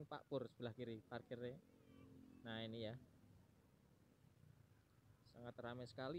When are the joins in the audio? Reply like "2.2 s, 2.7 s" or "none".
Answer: none